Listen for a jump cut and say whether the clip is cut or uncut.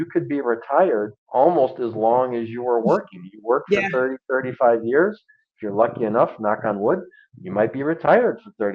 cut